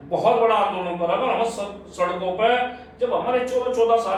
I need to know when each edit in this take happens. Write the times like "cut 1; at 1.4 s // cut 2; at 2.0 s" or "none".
none